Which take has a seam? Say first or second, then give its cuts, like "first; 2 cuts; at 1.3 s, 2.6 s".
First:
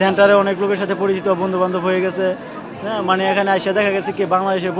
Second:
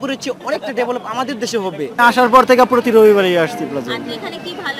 second; 1 cut; at 1.9 s